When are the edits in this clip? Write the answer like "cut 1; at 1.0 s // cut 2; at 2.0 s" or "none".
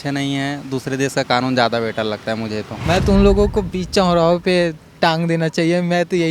cut 1; at 2.7 s